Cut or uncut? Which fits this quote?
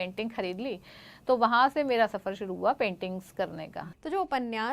cut